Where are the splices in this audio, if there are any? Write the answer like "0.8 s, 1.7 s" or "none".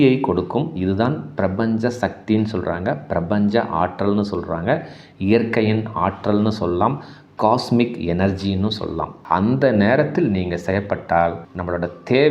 9.1 s

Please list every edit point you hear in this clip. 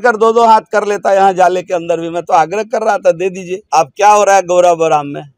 3.5 s

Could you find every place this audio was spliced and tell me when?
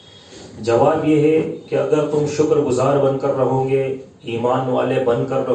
none

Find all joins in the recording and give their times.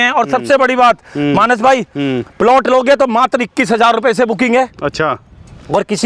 none

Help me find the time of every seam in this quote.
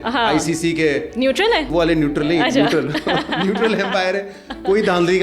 1.7 s

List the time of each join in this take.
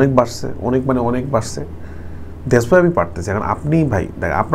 none

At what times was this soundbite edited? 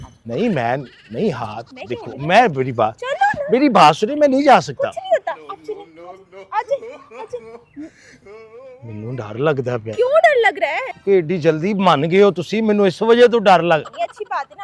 10.9 s

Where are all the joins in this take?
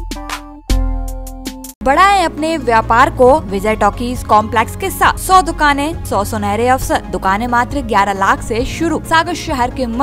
1.8 s, 3.5 s, 5.2 s, 6.0 s, 7.1 s, 9.0 s

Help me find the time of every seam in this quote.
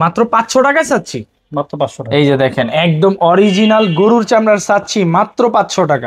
none

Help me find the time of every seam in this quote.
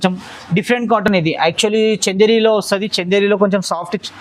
none

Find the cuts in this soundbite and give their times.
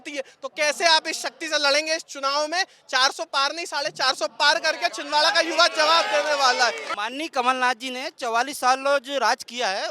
6.9 s

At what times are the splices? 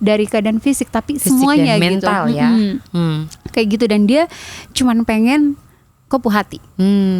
none

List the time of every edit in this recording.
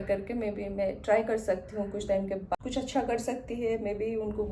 2.5 s

